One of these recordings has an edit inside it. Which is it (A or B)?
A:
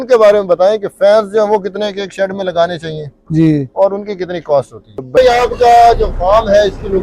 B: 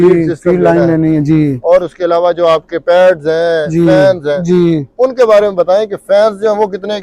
A